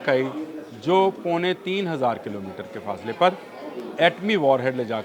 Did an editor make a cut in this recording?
no; 0 cuts

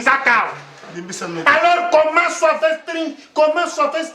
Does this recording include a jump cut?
no; 0 cuts

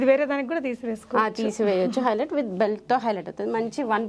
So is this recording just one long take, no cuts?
yes; 0 cuts

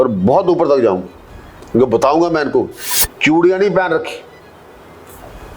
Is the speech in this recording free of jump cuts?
no; 1 cut; at 2.8 s

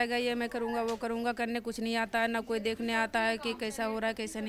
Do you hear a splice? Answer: no; 0 cuts

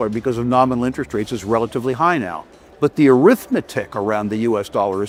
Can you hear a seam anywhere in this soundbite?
no; 0 cuts

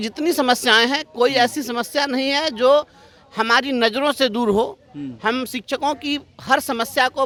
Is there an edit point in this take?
no; 0 cuts

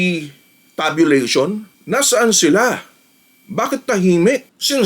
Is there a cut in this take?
no; 0 cuts

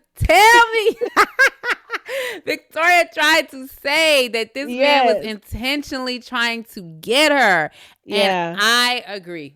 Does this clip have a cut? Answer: no; 0 cuts

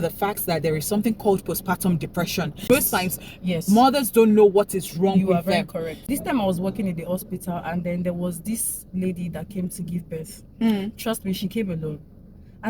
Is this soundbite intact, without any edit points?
no; 2 cuts; at 2.7 s, 6.1 s

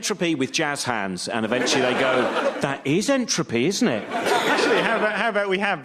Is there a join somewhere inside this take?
yes; 1 cut; at 2.7 s

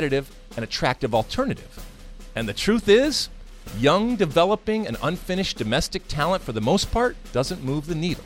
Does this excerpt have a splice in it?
yes; 1 cut; at 7.2 s

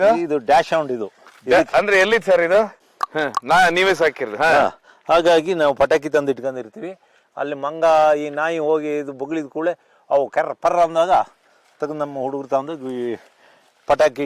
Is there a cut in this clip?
no; 0 cuts

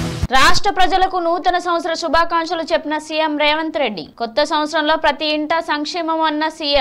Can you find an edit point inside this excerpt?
no; 0 cuts

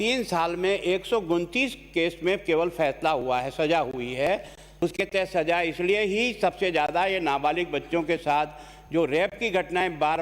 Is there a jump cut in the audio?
yes; 1 cut; at 4.6 s

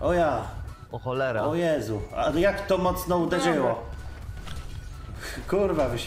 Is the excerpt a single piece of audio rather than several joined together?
no; 1 cut; at 4.4 s

